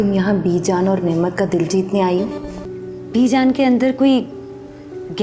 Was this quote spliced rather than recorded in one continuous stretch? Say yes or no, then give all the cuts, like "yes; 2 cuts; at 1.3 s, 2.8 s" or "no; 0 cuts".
yes; 1 cut; at 2.6 s